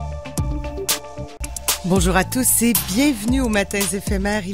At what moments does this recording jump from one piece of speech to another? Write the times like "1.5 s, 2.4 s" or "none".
1.3 s